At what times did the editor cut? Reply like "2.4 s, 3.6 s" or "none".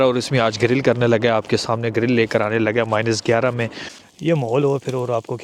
3.8 s